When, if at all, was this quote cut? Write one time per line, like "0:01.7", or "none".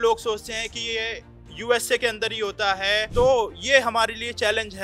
none